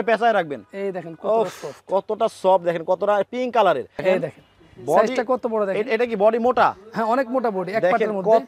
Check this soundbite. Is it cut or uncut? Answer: cut